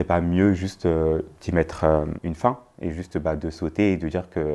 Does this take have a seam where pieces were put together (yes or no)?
no